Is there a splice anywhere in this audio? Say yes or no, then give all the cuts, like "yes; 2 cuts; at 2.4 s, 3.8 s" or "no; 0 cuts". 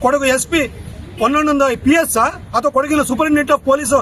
no; 0 cuts